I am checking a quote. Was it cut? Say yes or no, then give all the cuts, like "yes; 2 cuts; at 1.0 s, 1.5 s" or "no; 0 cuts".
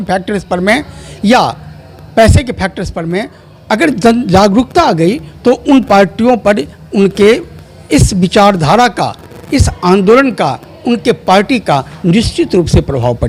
no; 0 cuts